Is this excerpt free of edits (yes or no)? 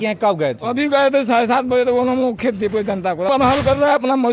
no